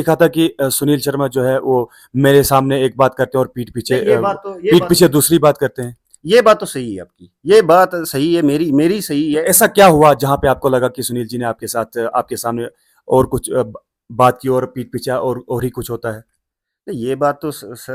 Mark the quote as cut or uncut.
uncut